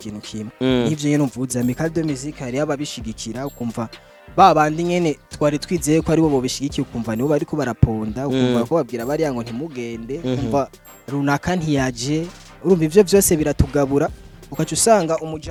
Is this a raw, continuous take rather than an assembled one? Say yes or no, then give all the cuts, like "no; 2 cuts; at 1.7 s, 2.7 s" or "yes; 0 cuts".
yes; 0 cuts